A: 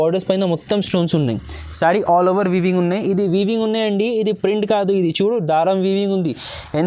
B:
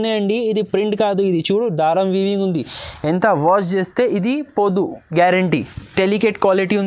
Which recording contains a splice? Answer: B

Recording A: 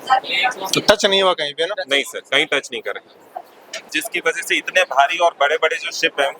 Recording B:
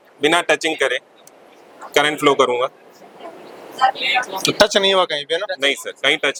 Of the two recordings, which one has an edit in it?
A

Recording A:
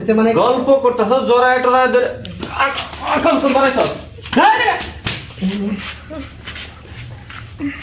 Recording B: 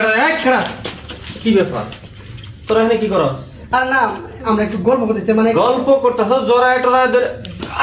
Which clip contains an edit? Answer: A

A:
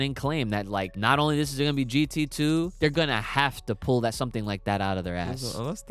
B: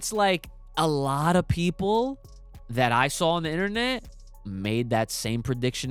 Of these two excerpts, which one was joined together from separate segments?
A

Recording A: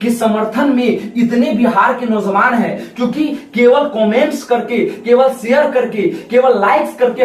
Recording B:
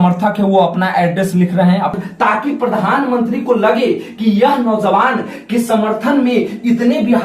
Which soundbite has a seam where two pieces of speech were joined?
B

